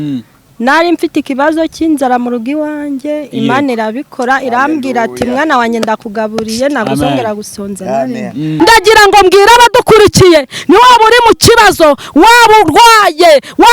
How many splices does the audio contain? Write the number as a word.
one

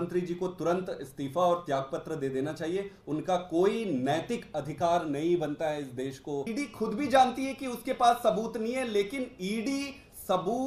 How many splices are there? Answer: one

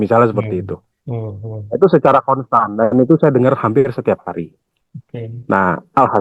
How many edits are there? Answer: zero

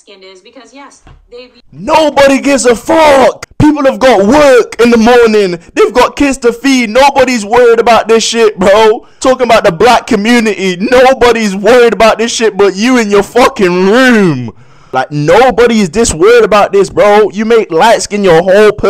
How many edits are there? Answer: four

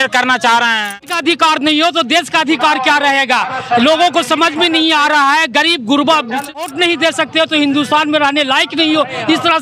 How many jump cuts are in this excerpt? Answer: two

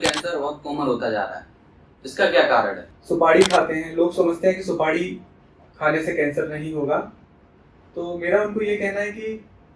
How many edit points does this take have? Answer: one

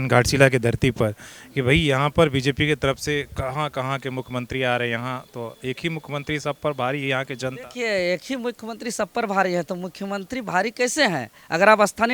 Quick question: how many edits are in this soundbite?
zero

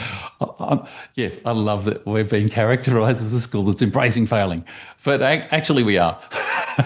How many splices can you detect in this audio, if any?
zero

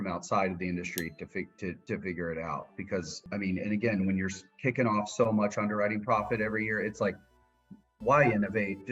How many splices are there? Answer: two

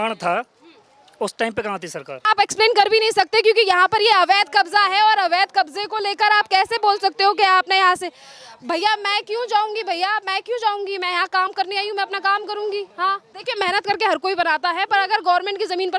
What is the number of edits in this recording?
two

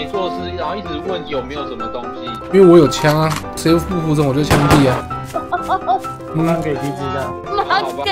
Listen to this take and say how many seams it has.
zero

